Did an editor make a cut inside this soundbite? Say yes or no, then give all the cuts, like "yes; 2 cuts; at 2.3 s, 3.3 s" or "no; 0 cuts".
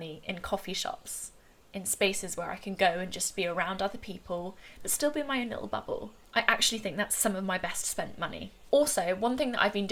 no; 0 cuts